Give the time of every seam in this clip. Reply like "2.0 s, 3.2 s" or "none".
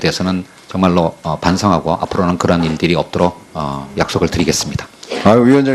2.2 s